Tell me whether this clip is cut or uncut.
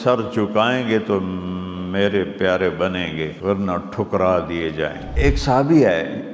cut